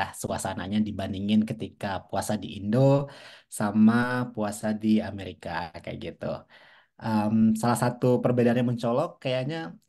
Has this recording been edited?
no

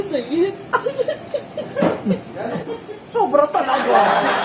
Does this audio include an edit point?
yes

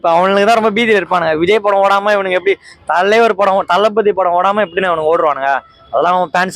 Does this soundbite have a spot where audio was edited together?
no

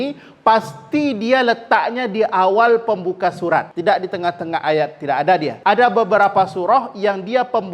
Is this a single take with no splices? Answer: no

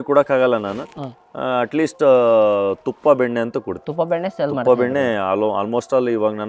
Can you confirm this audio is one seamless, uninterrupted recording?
yes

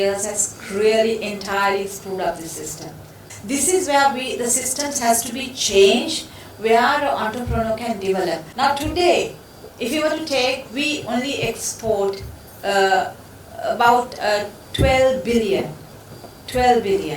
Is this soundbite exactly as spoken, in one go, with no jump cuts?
no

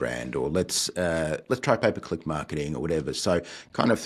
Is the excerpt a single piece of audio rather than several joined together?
yes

